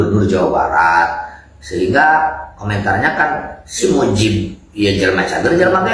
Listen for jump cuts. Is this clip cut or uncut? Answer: uncut